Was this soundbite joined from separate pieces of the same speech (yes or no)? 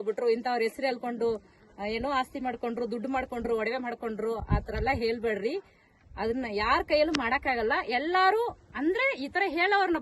no